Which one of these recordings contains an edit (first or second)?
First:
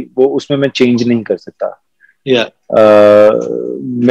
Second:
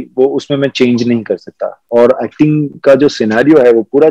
second